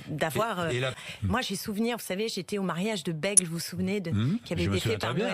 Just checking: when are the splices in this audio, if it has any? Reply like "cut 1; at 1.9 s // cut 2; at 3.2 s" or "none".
cut 1; at 1.0 s